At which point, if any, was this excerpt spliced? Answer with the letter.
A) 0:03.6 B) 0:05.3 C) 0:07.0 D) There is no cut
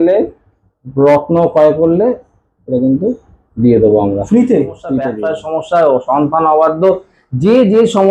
B